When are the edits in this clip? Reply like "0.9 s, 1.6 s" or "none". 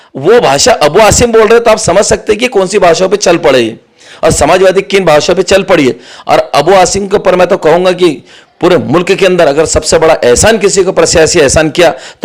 none